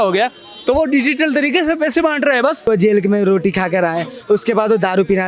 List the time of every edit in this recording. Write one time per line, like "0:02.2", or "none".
0:02.7

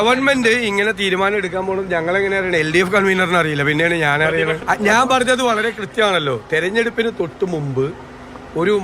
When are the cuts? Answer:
0:04.6

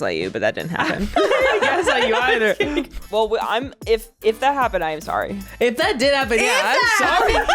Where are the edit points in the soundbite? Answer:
0:03.0

